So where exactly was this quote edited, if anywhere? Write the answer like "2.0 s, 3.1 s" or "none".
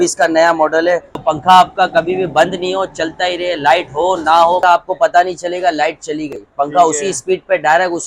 1.2 s, 4.6 s